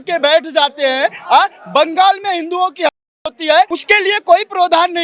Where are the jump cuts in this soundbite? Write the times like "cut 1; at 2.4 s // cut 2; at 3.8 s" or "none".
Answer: cut 1; at 3.8 s